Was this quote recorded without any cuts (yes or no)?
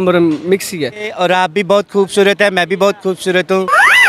no